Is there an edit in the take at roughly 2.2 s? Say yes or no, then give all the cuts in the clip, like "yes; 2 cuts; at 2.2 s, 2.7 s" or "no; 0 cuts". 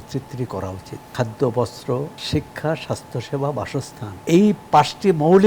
yes; 3 cuts; at 1.1 s, 2.2 s, 4.0 s